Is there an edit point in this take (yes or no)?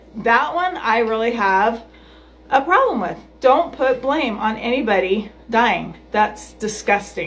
no